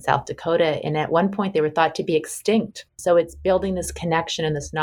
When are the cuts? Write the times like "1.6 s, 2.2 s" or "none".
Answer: 2.9 s

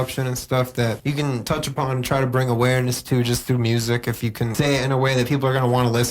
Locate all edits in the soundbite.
1.4 s, 4.5 s

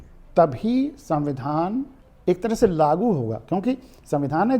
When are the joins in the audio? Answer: 2.0 s

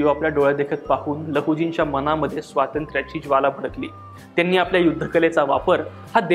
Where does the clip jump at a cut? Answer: none

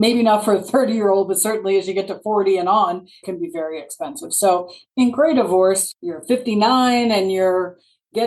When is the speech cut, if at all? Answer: 3.2 s, 5.9 s

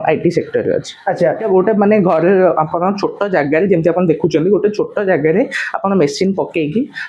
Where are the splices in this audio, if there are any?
1.4 s

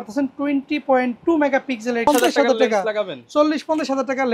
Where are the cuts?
2.1 s

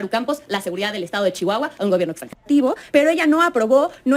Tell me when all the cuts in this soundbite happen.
2.4 s

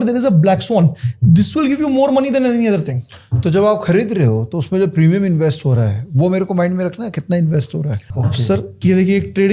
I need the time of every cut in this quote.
8.1 s

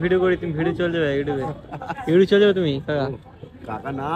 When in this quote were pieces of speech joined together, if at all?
none

